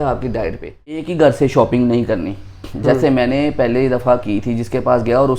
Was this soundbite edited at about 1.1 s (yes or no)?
yes